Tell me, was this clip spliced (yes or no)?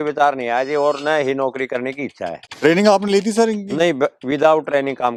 no